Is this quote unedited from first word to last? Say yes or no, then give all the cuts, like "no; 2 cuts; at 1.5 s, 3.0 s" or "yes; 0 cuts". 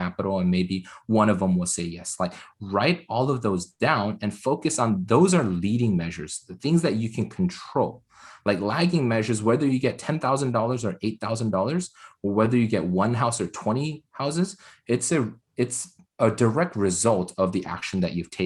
yes; 0 cuts